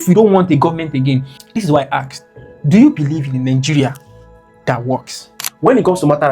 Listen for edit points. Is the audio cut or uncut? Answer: cut